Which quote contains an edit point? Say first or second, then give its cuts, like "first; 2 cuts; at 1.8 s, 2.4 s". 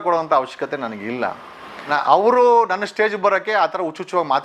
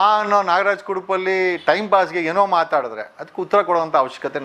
first; 1 cut; at 1.9 s